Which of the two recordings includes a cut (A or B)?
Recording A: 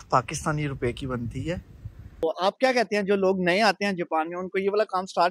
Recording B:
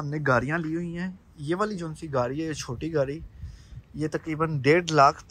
A